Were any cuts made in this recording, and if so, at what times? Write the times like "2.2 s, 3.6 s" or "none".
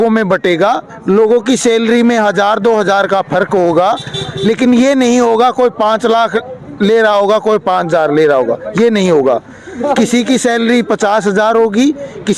none